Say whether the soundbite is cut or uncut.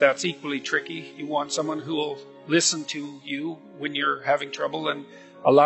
cut